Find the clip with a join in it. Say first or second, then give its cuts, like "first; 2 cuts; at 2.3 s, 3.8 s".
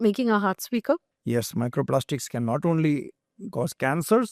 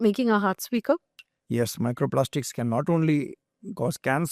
first; 1 cut; at 1.1 s